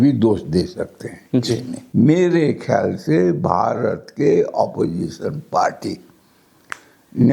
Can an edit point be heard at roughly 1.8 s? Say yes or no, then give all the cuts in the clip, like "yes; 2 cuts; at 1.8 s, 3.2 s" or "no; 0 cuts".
yes; 1 cut; at 1.8 s